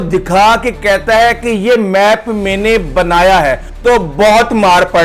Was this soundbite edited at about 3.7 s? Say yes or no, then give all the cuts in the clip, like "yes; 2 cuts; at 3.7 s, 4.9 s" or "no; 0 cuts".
yes; 1 cut; at 3.7 s